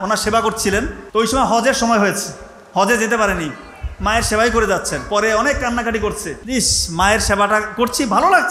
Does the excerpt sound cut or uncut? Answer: cut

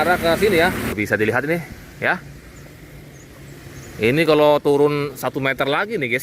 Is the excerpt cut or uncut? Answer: cut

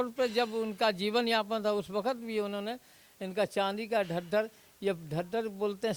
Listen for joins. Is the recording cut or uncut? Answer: uncut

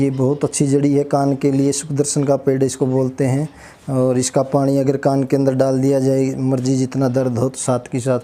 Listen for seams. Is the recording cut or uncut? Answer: uncut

